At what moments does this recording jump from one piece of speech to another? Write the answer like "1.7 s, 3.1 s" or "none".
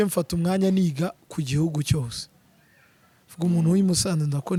none